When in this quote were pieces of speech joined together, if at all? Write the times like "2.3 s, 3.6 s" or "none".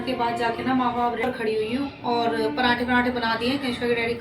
1.2 s